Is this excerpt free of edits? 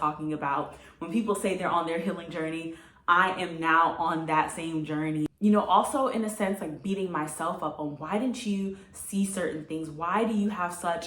no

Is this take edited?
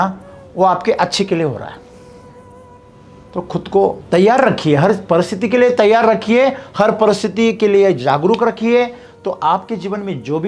yes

